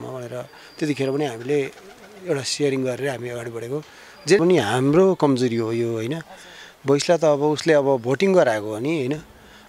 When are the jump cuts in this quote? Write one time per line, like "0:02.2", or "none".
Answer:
0:04.4